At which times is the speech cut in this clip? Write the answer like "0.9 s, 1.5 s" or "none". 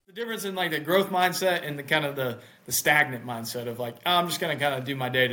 none